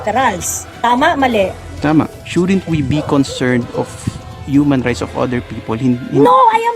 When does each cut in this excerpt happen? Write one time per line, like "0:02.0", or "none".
0:02.2